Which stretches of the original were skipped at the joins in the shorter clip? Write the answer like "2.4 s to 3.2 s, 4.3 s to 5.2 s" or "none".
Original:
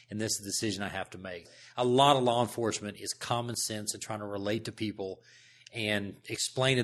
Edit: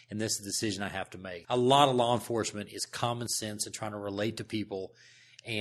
1.3 s to 1.6 s